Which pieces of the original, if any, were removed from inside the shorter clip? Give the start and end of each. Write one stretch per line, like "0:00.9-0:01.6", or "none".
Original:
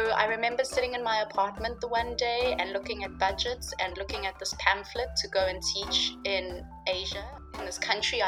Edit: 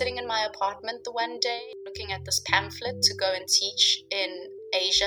0:02.3-0:03.7